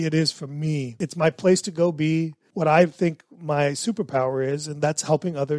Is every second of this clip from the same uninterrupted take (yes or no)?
no